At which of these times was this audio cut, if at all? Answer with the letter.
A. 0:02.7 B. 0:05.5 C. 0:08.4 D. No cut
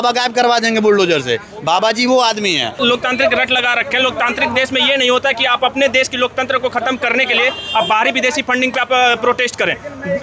A